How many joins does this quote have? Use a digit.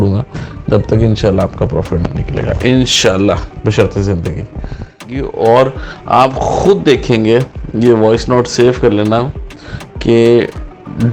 1